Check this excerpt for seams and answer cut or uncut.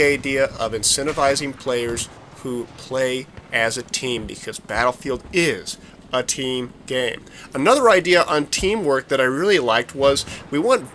cut